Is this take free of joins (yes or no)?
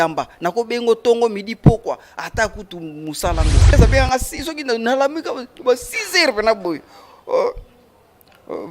no